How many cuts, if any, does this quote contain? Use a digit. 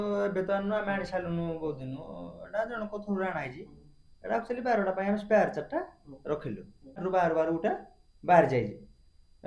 1